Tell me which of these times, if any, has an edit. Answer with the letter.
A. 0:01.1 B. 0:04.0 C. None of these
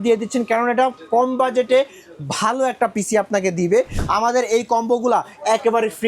B